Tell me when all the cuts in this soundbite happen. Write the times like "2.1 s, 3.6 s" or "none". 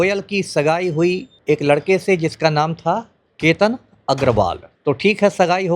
1.3 s, 4.7 s